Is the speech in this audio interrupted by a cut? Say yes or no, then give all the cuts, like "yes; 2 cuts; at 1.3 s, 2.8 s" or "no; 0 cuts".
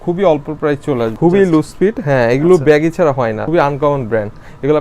yes; 2 cuts; at 1.1 s, 3.4 s